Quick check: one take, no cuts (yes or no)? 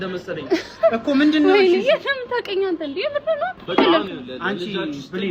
yes